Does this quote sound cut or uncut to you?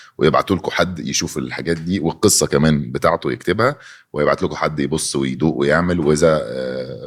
uncut